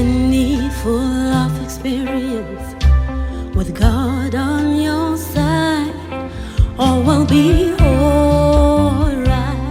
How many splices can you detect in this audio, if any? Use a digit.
0